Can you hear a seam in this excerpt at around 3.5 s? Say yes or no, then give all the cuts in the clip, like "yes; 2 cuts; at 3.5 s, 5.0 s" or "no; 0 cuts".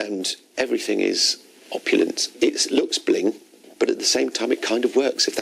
no; 1 cut; at 2.3 s